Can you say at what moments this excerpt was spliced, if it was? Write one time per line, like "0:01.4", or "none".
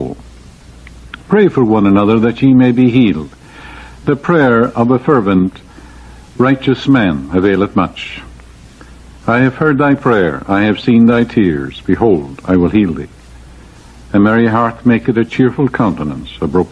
none

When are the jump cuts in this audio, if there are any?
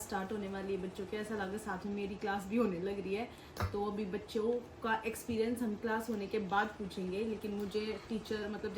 none

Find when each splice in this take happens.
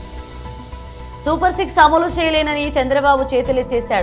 0:01.2

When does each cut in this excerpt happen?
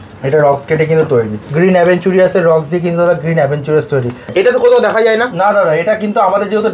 0:01.4
0:04.3

